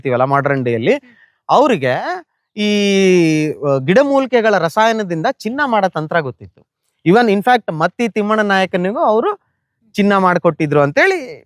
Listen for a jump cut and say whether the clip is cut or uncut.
uncut